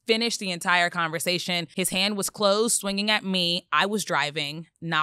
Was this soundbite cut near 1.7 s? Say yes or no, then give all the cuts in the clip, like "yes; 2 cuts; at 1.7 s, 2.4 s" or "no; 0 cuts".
yes; 1 cut; at 1.7 s